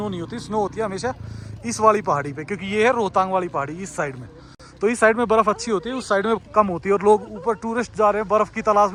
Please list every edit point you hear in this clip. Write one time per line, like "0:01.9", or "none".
none